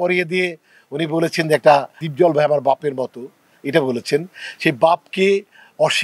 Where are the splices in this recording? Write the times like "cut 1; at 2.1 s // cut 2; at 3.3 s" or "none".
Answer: none